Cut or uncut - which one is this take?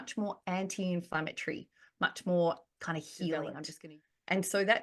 cut